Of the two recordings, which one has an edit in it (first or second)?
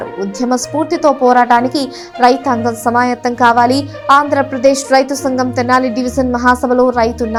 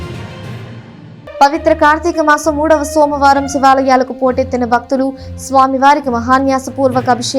second